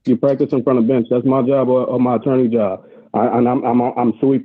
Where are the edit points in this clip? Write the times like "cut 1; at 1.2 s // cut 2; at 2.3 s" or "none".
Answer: none